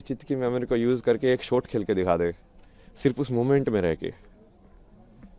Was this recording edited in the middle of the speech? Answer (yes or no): no